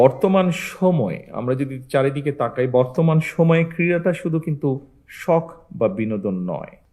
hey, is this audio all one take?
yes; 0 cuts

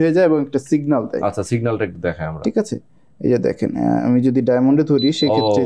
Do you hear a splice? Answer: no; 0 cuts

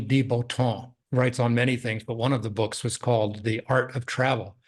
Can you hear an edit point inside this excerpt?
yes; 1 cut; at 0.9 s

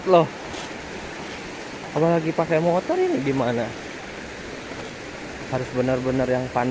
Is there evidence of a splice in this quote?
no; 0 cuts

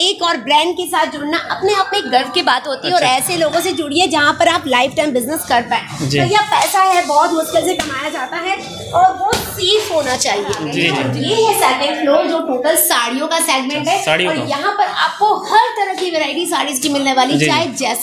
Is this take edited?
no; 0 cuts

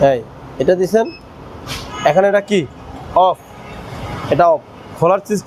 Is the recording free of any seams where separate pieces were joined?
yes; 0 cuts

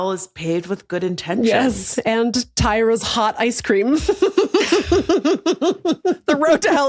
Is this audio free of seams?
yes; 0 cuts

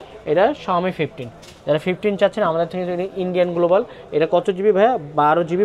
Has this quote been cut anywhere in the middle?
no; 0 cuts

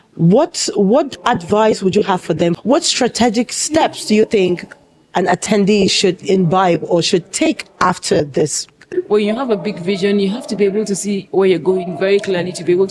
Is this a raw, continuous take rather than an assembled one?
no; 2 cuts; at 2.6 s, 8.8 s

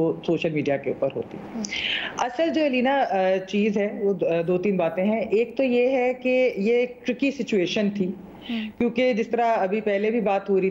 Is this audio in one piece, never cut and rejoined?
yes; 0 cuts

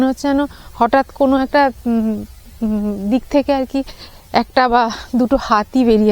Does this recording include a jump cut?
no; 0 cuts

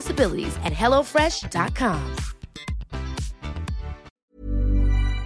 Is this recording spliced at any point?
yes; 1 cut; at 4.2 s

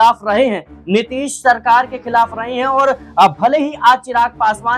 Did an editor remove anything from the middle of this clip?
no; 0 cuts

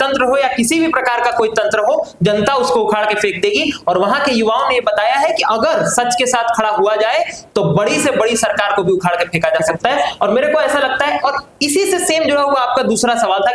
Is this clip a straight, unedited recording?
yes; 0 cuts

